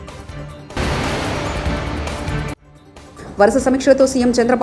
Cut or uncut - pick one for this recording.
cut